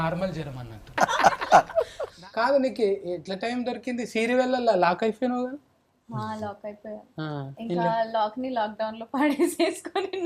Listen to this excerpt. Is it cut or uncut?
cut